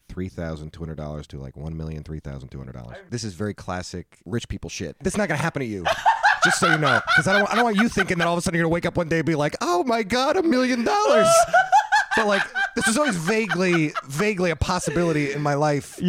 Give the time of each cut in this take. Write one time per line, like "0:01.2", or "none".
0:02.8
0:04.2
0:05.0